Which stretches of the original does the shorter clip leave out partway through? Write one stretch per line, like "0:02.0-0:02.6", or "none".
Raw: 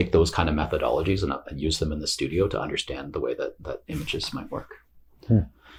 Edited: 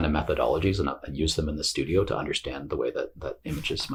none